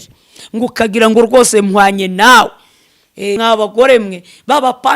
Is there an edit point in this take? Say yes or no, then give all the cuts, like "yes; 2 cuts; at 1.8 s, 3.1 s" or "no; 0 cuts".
yes; 1 cut; at 3.4 s